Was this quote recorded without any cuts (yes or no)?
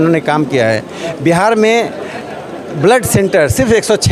yes